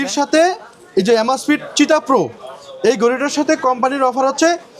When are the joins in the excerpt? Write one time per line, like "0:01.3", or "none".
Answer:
none